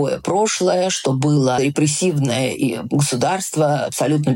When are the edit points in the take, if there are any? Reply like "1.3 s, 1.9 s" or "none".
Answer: 1.6 s